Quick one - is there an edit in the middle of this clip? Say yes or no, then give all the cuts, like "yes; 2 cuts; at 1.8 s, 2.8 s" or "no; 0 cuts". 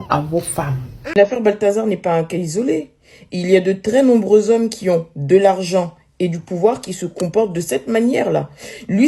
yes; 1 cut; at 1.0 s